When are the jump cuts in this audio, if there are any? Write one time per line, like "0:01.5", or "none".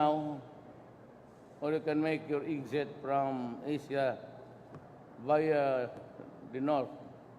0:01.6